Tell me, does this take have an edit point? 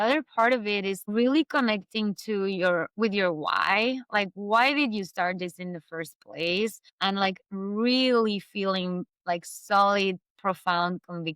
yes; 1 cut; at 1.0 s

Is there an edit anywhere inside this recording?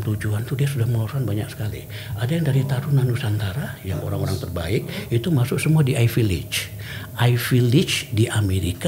no; 0 cuts

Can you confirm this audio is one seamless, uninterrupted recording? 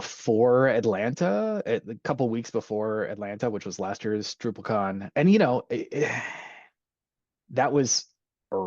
no; 1 cut; at 5.1 s

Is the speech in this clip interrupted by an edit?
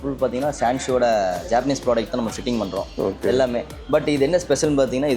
no; 0 cuts

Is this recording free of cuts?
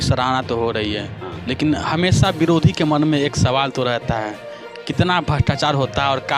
yes; 0 cuts

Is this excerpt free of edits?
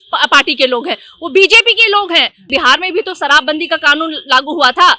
no; 1 cut; at 2.4 s

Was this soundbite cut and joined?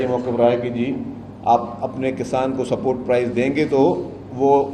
no; 0 cuts

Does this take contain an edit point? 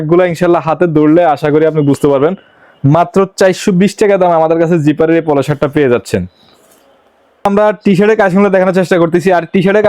no; 0 cuts

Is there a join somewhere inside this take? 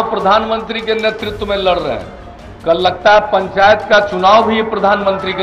no; 0 cuts

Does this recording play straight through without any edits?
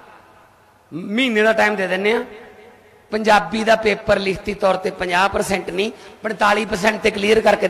yes; 0 cuts

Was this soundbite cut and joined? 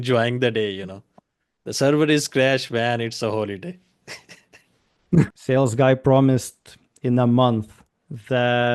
yes; 1 cut; at 5.4 s

